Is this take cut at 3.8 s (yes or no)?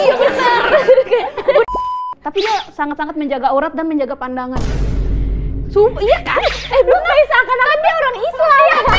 no